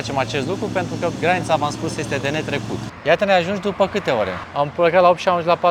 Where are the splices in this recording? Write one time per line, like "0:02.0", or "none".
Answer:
0:02.9
0:04.4